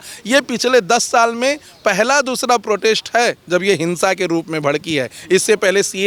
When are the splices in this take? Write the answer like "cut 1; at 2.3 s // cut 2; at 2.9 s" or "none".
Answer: none